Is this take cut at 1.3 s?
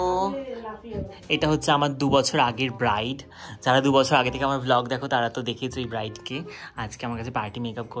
no; 0 cuts

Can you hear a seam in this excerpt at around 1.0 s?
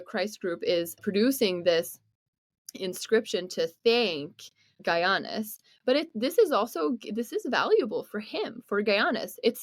yes; 2 cuts; at 1.0 s, 4.7 s

